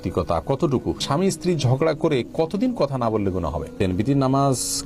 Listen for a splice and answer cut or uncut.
cut